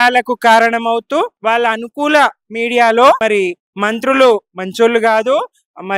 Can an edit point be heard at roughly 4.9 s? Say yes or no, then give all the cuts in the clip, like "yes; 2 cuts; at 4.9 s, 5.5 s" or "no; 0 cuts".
no; 2 cuts; at 1.3 s, 3.2 s